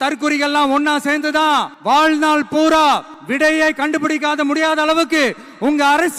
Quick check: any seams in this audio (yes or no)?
yes